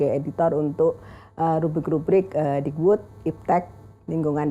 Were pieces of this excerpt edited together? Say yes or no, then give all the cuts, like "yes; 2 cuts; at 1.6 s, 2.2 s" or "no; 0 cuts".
no; 0 cuts